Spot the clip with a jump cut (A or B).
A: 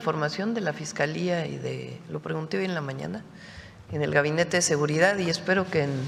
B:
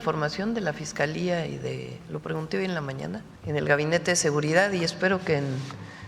B